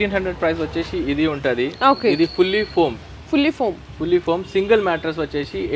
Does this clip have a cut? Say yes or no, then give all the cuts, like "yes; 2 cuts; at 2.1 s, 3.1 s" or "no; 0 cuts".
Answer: no; 0 cuts